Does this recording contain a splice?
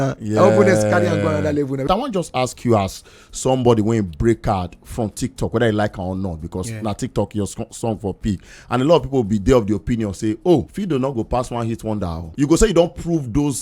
yes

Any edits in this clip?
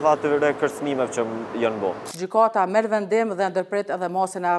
yes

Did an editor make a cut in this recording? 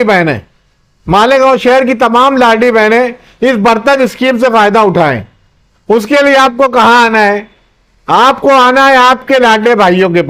no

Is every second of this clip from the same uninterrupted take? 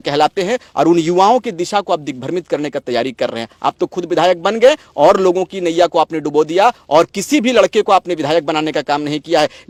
yes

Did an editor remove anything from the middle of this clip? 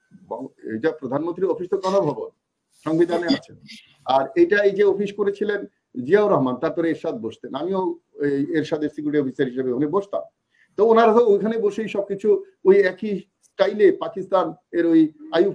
no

